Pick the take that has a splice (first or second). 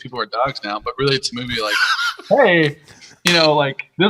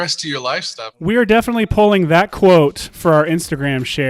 second